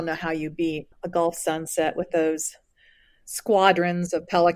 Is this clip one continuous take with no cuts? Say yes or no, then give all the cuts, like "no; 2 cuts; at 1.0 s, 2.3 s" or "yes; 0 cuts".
no; 1 cut; at 0.9 s